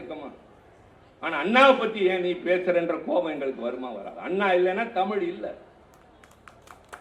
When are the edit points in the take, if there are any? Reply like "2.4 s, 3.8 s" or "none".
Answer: none

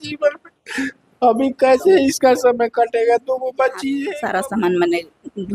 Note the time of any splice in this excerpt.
4.1 s

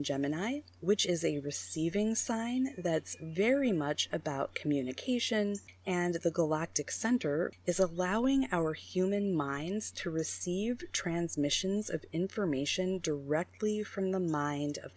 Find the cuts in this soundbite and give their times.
5.7 s, 7.5 s

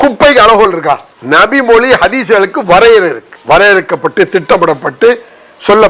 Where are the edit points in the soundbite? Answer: 1.1 s, 3.3 s

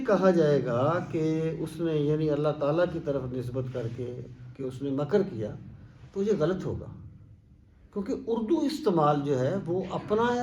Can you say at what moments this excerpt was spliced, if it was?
none

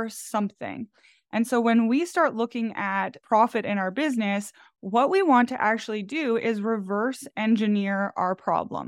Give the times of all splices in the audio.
3.1 s

